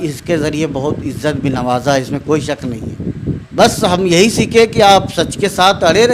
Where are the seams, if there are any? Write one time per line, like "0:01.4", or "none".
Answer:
0:02.9